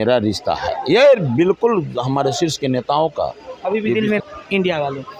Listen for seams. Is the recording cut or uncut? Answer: cut